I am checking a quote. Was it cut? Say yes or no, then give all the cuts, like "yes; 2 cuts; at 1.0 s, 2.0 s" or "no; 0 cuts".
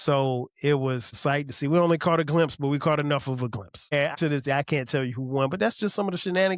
yes; 2 cuts; at 1.1 s, 4.1 s